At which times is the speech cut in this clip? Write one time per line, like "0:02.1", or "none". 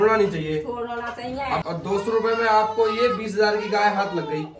0:01.6

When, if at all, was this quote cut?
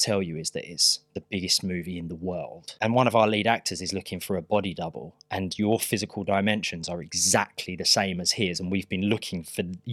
0:02.6

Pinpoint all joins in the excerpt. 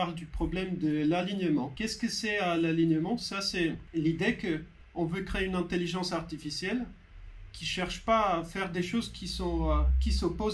0:01.8
0:03.8
0:04.8

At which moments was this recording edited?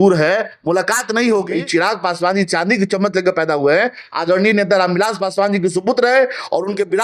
0:01.5

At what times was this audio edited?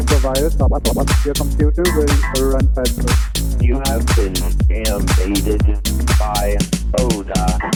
none

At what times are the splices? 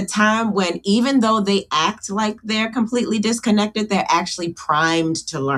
none

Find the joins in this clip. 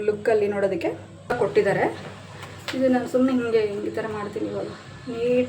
0:01.4

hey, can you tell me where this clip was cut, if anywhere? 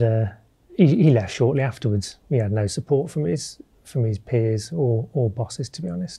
none

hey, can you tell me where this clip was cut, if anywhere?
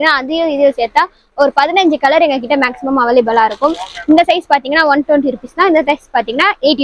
none

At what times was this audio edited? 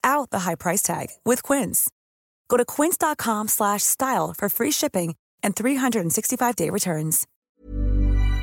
0:07.3

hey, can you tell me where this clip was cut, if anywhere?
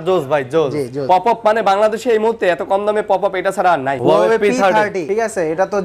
0:01.0
0:04.0
0:05.0

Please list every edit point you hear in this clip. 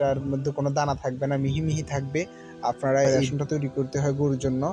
0:03.1

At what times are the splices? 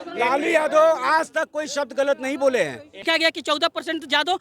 0:02.9

